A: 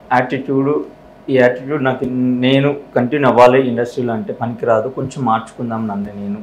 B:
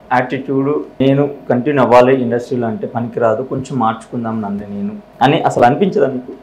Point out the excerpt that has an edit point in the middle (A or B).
B